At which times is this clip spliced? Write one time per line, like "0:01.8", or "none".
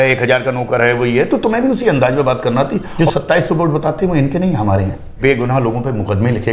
0:02.9
0:05.2